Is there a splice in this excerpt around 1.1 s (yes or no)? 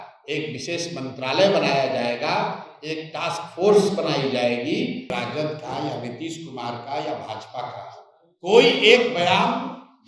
no